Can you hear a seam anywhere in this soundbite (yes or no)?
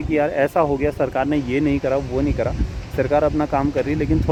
no